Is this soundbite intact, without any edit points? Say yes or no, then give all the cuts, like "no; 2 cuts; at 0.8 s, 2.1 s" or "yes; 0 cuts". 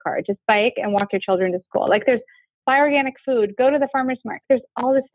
no; 2 cuts; at 2.6 s, 4.4 s